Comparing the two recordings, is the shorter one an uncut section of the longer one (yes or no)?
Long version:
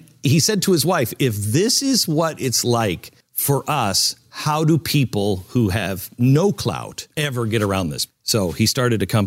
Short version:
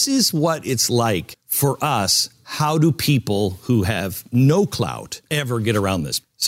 no